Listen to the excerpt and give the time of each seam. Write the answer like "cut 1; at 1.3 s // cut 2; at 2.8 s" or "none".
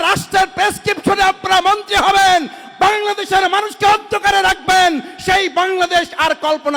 none